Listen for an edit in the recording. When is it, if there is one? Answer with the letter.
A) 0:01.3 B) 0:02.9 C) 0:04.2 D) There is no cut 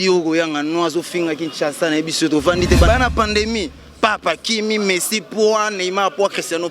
B